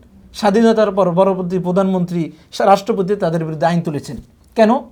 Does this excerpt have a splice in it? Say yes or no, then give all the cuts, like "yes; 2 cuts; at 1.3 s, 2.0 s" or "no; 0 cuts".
no; 0 cuts